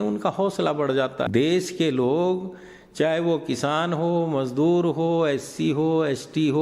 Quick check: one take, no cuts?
no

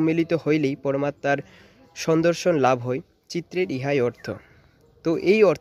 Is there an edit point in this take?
no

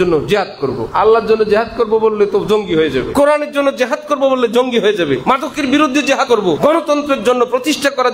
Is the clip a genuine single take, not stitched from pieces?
no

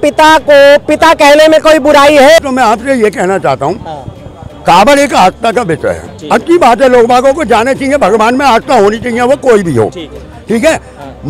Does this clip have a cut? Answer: yes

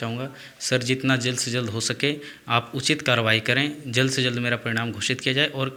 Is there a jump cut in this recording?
no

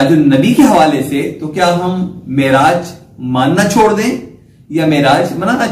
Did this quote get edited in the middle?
no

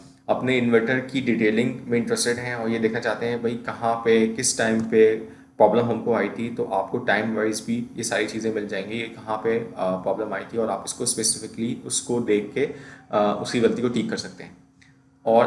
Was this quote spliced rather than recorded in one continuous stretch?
no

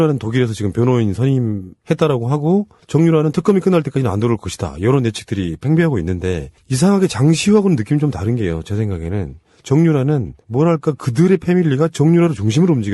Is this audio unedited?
yes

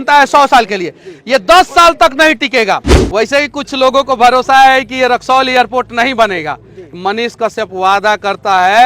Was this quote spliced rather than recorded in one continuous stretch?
yes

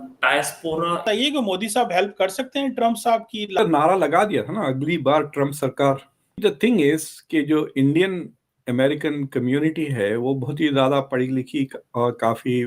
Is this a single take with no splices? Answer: no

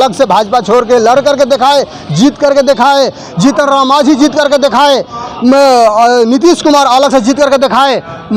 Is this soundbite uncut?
yes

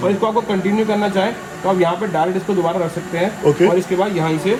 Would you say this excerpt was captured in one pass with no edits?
yes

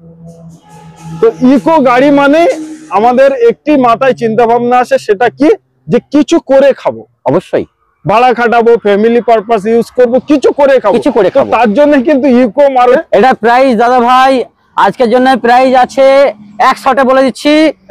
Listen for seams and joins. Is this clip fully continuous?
no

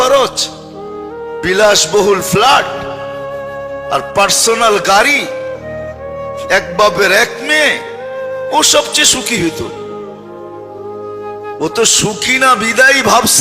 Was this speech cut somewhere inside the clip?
yes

